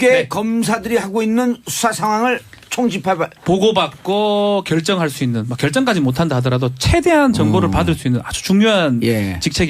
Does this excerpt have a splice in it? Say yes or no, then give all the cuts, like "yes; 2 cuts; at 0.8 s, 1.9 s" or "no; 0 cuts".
yes; 1 cut; at 8.0 s